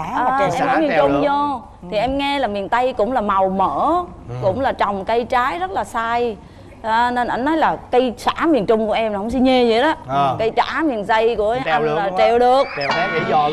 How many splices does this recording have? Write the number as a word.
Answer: zero